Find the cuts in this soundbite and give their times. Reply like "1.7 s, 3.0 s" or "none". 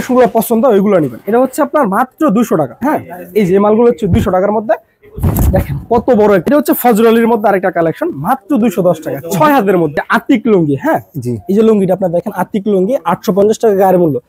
2.8 s, 6.4 s, 10.0 s